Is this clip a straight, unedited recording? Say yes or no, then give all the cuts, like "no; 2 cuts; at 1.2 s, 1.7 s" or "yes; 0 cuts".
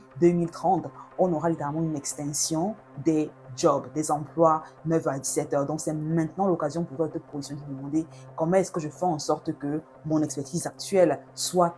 yes; 0 cuts